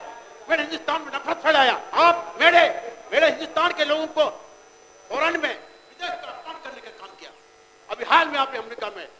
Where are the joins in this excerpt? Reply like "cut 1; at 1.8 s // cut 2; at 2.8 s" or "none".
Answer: cut 1; at 1.8 s